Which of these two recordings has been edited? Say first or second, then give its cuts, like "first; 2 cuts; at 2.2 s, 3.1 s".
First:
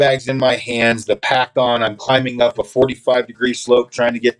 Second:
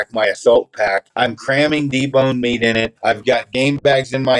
second; 2 cuts; at 1.1 s, 2.9 s